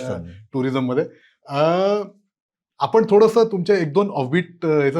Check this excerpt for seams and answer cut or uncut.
uncut